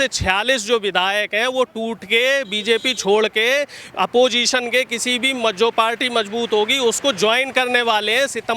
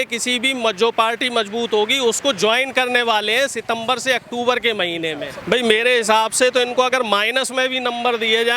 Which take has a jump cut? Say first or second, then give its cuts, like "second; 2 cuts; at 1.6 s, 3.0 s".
second; 1 cut; at 5.3 s